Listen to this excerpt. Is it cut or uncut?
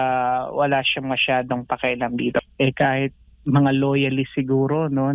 cut